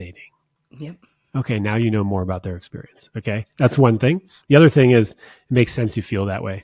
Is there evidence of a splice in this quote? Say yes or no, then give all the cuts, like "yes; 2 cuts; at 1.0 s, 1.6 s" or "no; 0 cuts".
no; 0 cuts